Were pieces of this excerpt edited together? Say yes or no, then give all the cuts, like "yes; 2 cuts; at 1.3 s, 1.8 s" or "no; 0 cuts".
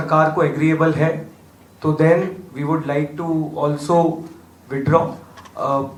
no; 0 cuts